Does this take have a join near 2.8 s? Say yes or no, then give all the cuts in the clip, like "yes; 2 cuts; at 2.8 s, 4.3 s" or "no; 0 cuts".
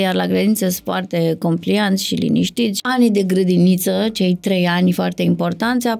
yes; 1 cut; at 2.8 s